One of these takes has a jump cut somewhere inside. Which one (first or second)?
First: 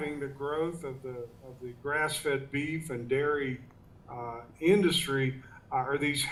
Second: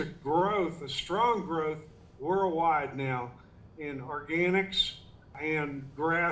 second